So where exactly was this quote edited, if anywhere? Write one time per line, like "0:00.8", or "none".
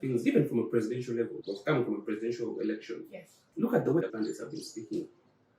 0:01.3
0:04.0